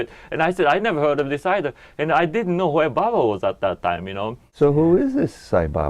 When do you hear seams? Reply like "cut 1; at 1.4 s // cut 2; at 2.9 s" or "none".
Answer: cut 1; at 4.4 s